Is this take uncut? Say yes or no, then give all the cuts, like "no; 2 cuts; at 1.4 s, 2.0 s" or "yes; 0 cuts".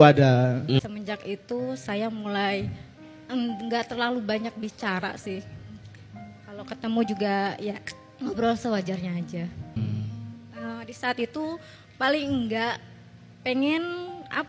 no; 2 cuts; at 0.8 s, 9.7 s